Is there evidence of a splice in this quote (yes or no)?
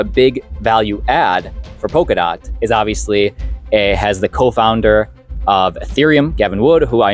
no